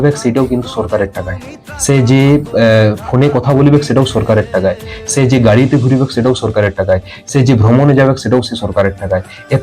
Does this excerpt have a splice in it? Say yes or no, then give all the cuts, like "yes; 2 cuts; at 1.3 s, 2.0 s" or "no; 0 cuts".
no; 0 cuts